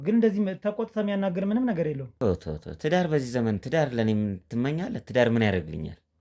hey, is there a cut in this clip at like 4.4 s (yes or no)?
no